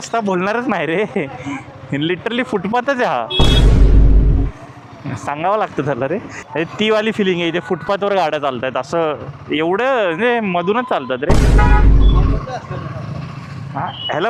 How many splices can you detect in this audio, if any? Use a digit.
0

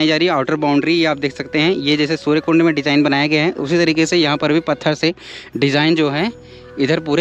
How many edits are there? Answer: 0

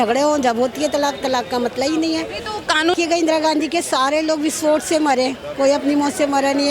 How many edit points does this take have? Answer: 1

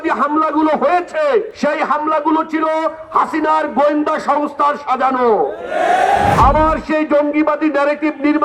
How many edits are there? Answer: 2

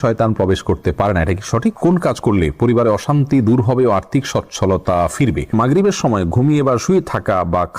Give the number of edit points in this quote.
2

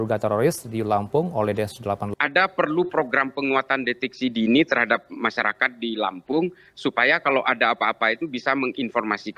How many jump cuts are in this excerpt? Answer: 1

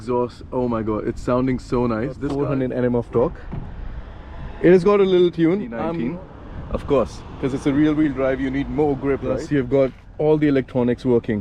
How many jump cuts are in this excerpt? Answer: 3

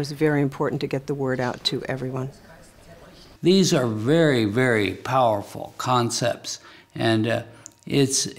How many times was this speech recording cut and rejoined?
1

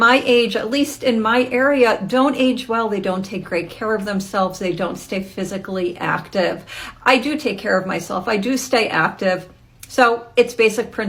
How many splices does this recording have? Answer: 0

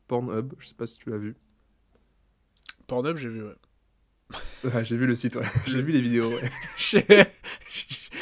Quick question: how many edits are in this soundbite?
0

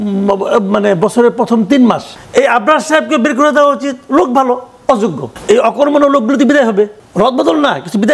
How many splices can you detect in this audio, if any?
3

